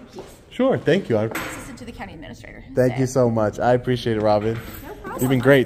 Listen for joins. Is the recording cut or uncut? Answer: cut